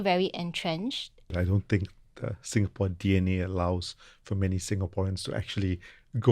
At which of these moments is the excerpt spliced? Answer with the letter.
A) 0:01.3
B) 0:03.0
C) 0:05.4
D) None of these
A